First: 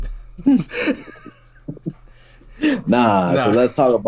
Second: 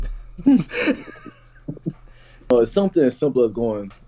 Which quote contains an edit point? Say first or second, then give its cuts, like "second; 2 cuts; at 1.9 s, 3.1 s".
second; 1 cut; at 2.5 s